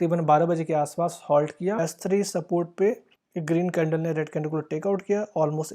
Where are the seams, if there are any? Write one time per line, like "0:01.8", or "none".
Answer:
0:01.8

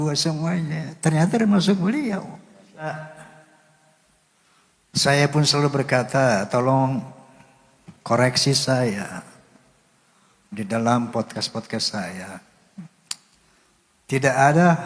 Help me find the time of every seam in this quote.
0:02.9

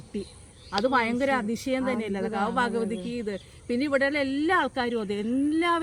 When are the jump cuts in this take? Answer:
none

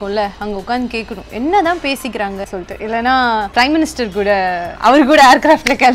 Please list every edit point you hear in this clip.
0:02.4
0:03.5
0:04.7

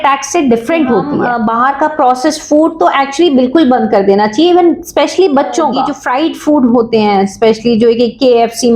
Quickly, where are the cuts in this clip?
0:01.2
0:06.0

